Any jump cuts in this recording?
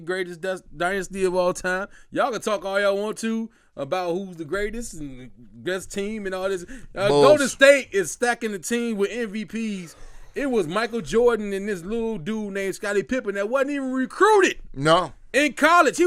no; 0 cuts

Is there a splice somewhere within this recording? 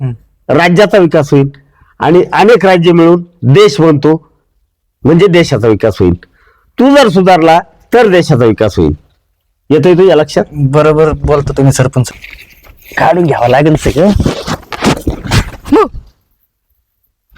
yes; 1 cut; at 12.1 s

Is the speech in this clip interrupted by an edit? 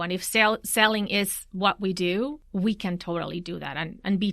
yes; 1 cut; at 2.4 s

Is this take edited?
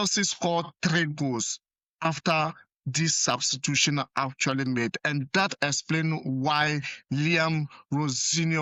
no; 0 cuts

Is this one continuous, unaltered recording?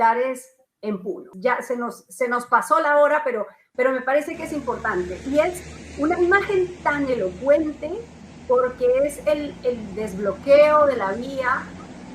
no; 1 cut; at 1.3 s

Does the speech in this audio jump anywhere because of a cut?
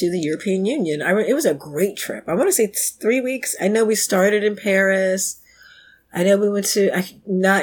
no; 0 cuts

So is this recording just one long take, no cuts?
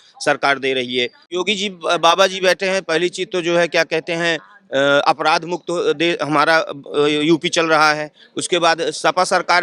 no; 1 cut; at 1.2 s

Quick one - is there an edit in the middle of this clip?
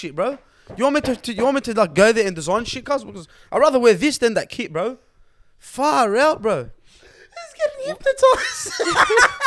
no; 0 cuts

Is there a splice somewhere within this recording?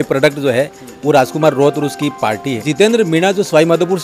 yes; 1 cut; at 2.7 s

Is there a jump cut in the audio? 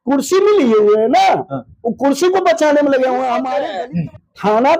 yes; 1 cut; at 3.5 s

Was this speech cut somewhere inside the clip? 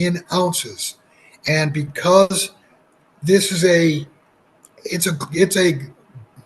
no; 0 cuts

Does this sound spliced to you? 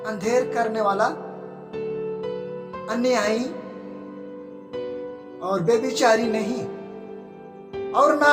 yes; 2 cuts; at 3.6 s, 5.4 s

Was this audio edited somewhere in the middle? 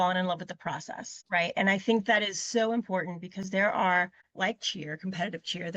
yes; 2 cuts; at 1.2 s, 4.2 s

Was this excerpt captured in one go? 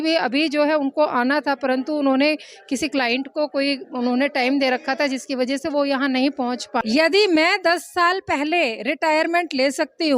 no; 1 cut; at 6.8 s

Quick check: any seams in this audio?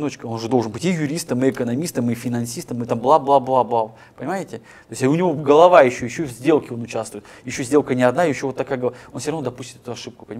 no; 0 cuts

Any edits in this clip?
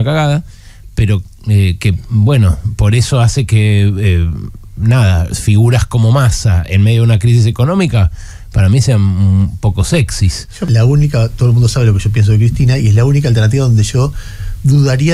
yes; 1 cut; at 10.6 s

